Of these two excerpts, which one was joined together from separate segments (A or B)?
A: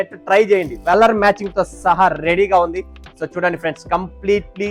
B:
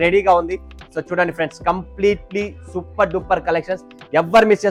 A